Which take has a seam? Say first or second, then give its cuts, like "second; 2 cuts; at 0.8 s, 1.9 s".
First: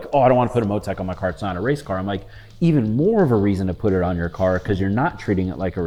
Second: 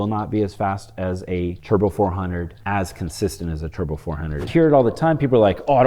second; 3 cuts; at 1.6 s, 2.5 s, 4.4 s